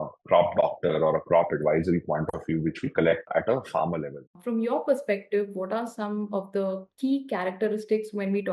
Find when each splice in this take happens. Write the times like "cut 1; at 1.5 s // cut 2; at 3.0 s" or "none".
cut 1; at 4.2 s